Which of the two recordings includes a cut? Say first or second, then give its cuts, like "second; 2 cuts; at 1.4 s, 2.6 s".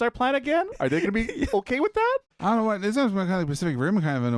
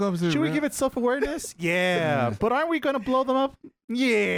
first; 1 cut; at 2.3 s